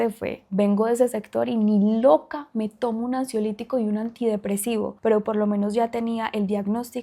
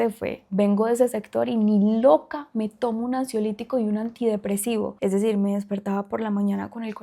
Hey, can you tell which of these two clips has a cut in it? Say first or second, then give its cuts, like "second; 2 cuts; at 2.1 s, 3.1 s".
second; 1 cut; at 4.9 s